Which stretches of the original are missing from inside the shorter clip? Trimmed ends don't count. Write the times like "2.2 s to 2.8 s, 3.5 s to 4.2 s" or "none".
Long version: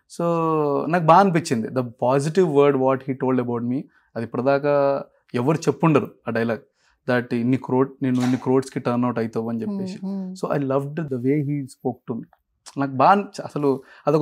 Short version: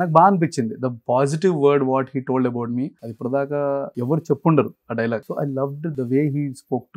4.0 s to 4.2 s, 5.1 s to 5.3 s, 6.7 s to 10.4 s